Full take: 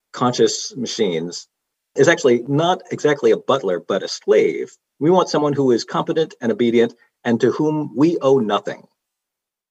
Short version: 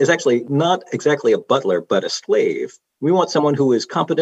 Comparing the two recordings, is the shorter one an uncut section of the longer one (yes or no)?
yes